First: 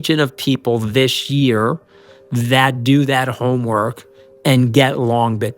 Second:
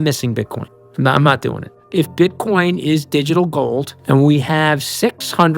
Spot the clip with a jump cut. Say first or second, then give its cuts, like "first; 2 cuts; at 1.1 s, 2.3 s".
second; 2 cuts; at 1.8 s, 3.9 s